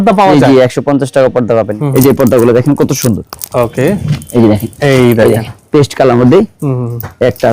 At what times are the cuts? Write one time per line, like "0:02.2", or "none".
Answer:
0:01.8